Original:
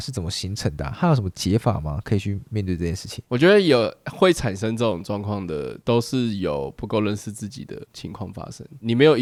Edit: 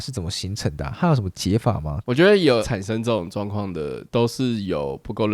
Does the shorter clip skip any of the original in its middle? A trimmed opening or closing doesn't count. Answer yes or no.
yes